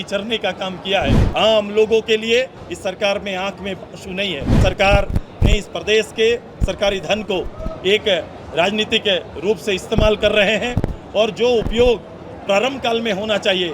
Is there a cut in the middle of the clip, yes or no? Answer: yes